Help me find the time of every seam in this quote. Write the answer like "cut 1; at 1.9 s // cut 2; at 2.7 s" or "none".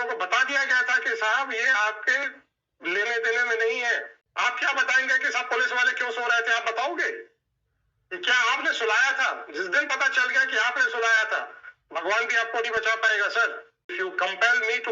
cut 1; at 4.2 s // cut 2; at 13.9 s